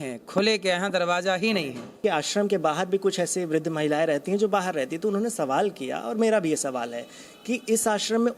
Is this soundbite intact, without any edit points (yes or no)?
no